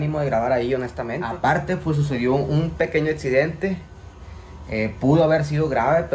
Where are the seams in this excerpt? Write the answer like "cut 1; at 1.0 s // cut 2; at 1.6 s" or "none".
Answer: cut 1; at 1.2 s